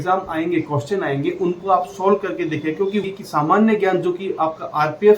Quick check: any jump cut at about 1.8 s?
no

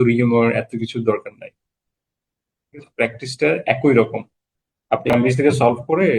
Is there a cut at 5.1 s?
yes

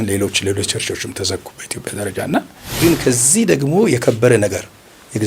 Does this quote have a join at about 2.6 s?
yes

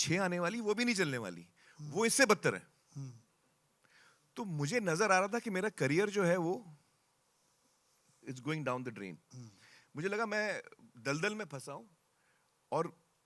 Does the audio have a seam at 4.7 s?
no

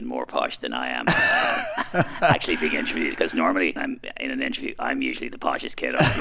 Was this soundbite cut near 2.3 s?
no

